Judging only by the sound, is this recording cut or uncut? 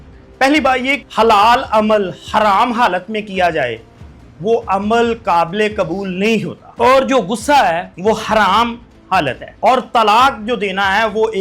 cut